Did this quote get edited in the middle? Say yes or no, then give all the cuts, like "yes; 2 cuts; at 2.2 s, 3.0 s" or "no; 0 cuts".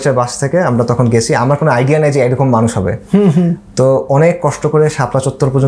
no; 0 cuts